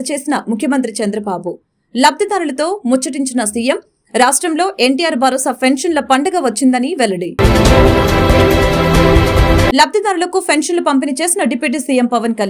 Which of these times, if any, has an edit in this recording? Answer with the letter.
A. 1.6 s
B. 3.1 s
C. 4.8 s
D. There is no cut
D